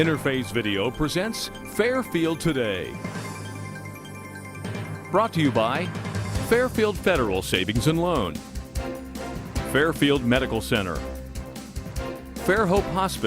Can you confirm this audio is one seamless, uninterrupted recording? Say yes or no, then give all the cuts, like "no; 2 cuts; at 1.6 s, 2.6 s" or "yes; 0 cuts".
yes; 0 cuts